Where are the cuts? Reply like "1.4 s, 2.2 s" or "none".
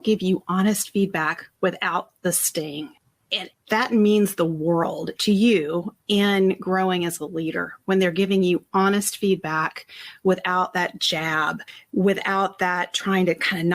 5.1 s